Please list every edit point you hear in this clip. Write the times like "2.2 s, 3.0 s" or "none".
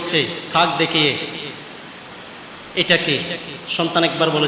none